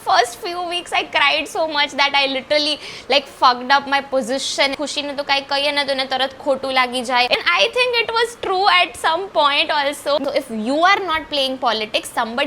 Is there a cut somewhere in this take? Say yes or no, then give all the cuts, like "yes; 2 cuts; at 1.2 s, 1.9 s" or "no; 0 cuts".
yes; 3 cuts; at 4.7 s, 7.4 s, 10.2 s